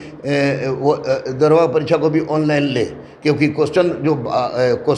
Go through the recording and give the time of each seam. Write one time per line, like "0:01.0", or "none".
none